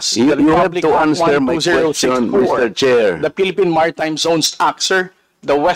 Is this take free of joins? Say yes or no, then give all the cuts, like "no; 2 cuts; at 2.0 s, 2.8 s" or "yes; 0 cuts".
yes; 0 cuts